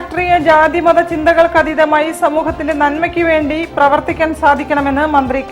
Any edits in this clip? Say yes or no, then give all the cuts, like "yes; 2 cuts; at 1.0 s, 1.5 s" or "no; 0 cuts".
no; 0 cuts